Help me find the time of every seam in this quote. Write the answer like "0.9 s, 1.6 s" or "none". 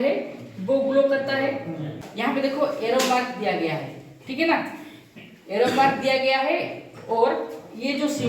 2.0 s

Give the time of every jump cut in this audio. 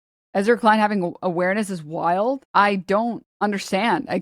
2.4 s, 3.3 s

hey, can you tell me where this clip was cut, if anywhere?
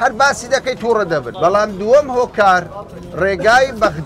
1.3 s

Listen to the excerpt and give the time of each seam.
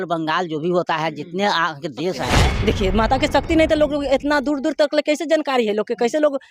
2.5 s

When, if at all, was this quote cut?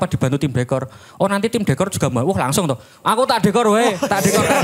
none

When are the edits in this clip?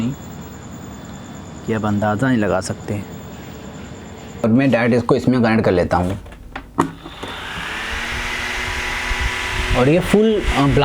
4.4 s

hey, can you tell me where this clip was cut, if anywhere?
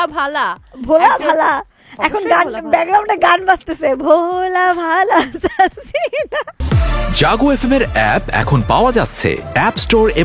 6.5 s

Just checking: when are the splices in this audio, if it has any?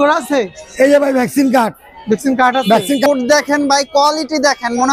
3.1 s

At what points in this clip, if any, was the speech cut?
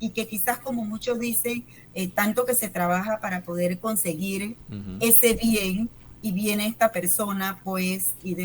1.8 s, 6.1 s

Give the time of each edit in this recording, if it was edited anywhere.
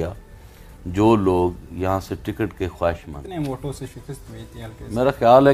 3.2 s

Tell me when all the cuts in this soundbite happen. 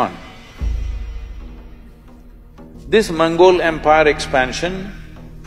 2.8 s

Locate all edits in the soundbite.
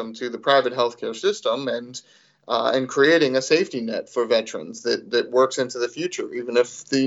none

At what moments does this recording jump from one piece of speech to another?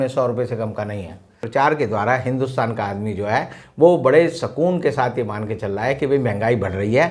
1.4 s

